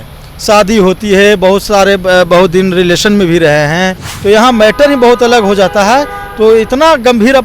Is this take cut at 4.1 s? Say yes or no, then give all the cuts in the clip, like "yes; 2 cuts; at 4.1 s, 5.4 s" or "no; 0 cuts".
yes; 1 cut; at 4.1 s